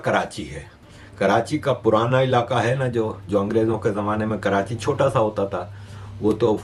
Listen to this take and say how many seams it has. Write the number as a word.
zero